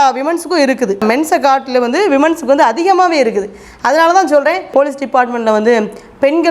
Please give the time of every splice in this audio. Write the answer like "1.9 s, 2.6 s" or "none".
1.0 s, 4.7 s